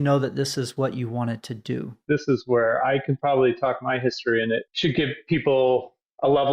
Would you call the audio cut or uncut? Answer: cut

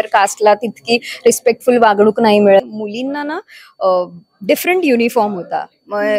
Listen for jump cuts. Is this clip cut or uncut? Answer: cut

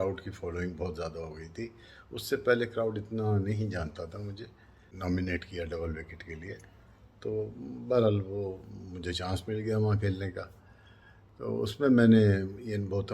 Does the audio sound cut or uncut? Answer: cut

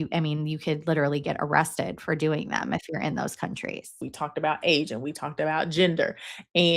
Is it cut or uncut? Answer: cut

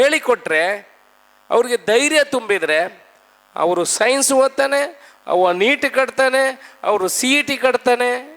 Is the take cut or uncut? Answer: uncut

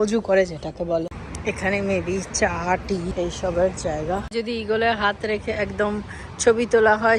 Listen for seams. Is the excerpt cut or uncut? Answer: cut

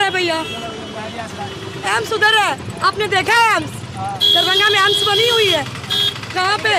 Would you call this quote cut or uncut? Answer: uncut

